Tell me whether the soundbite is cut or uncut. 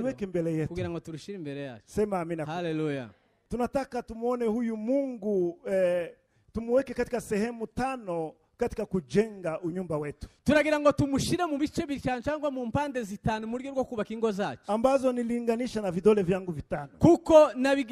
cut